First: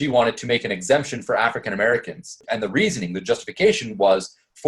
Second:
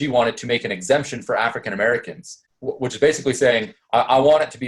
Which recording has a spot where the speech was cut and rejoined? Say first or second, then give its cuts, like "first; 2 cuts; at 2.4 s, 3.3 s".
first; 1 cut; at 2.4 s